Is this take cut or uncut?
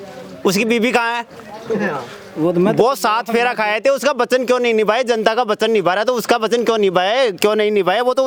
uncut